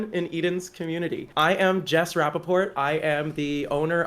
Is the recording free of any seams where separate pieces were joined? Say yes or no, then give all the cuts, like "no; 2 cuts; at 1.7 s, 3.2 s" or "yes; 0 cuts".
no; 1 cut; at 1.3 s